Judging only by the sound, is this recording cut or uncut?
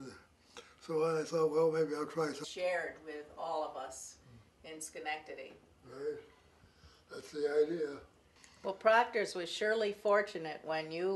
uncut